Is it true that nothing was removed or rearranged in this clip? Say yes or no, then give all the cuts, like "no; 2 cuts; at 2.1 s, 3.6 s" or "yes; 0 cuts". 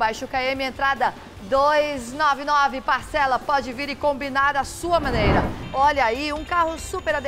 no; 1 cut; at 5.6 s